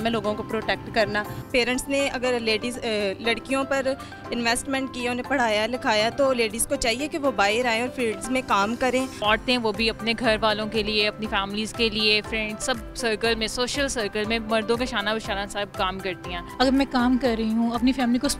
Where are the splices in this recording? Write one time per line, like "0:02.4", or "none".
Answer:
0:01.4
0:09.2
0:16.4